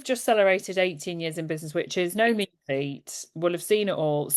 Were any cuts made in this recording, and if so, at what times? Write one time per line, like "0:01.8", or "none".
none